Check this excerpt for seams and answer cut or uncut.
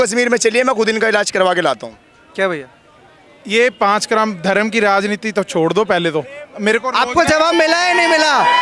uncut